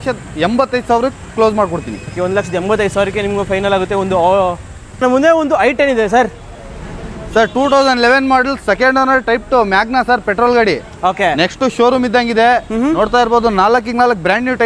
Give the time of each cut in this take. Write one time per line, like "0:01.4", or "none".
none